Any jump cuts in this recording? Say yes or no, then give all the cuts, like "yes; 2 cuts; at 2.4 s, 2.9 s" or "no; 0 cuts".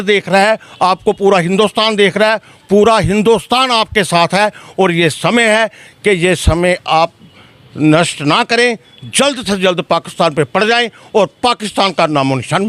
no; 0 cuts